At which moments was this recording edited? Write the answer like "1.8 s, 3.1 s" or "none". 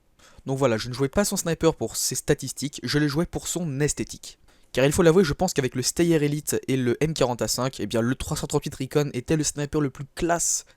9.2 s